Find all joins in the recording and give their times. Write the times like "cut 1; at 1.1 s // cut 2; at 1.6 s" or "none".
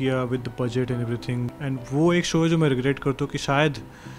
cut 1; at 1.5 s

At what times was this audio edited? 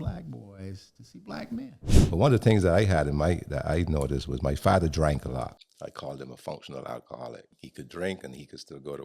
cut 1; at 1.9 s // cut 2; at 5.6 s // cut 3; at 7.6 s

